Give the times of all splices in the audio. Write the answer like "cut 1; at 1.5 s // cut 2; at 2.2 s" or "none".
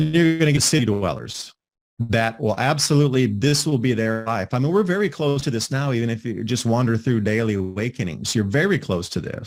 none